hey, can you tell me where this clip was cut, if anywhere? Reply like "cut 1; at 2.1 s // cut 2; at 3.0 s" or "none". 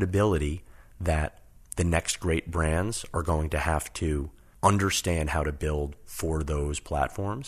cut 1; at 4.4 s

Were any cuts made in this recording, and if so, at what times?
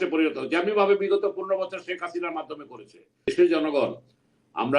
cut 1; at 3.3 s

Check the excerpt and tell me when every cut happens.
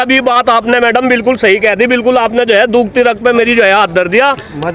none

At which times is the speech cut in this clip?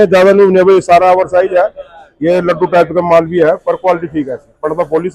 none

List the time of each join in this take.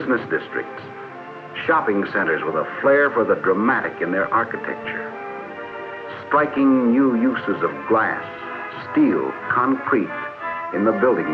cut 1; at 6.1 s

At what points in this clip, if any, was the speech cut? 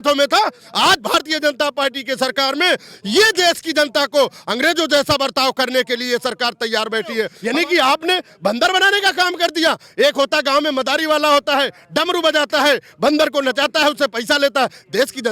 cut 1; at 7.4 s

